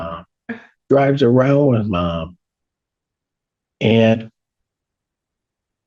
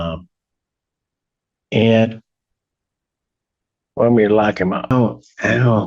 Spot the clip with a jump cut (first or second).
second